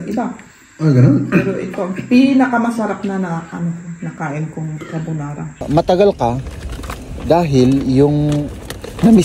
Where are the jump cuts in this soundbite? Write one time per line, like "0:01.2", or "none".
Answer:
0:05.6